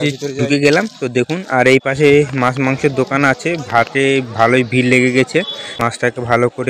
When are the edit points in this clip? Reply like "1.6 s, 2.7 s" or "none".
5.6 s